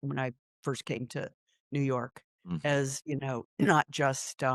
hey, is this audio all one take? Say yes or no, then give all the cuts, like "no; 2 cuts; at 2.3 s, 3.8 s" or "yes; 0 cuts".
yes; 0 cuts